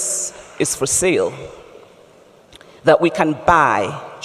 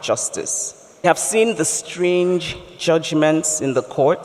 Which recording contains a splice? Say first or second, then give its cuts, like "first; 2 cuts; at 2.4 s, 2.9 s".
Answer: second; 1 cut; at 1.0 s